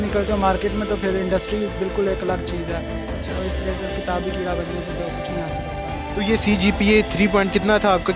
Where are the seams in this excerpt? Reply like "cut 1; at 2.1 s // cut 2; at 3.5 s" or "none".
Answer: none